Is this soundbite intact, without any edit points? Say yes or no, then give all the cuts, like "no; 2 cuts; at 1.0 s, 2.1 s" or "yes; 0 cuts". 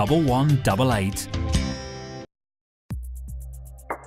no; 1 cut; at 2.3 s